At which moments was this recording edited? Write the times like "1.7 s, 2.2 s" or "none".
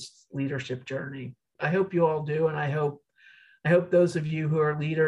1.5 s